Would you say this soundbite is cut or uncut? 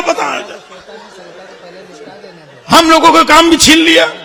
uncut